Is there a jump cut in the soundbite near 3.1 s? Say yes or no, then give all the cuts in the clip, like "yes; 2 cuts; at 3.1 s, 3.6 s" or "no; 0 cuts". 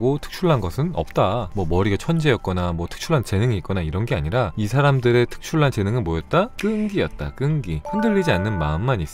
no; 4 cuts; at 1.5 s, 4.5 s, 6.5 s, 7.8 s